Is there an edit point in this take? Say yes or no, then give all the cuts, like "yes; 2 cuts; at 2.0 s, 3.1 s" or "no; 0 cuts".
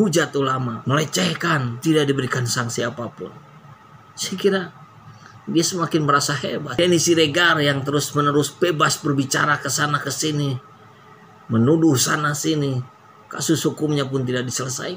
yes; 1 cut; at 6.8 s